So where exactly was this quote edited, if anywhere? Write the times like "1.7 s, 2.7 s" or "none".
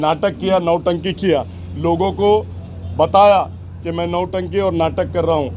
none